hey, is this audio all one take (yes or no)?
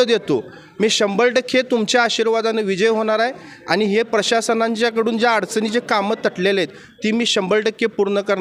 yes